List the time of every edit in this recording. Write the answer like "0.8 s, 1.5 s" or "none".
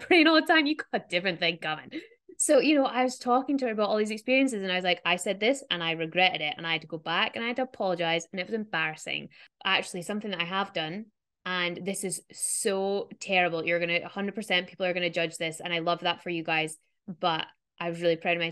9.5 s